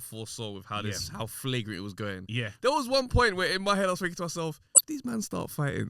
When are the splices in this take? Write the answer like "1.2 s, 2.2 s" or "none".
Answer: 4.7 s